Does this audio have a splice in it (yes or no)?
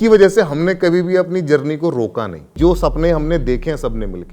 yes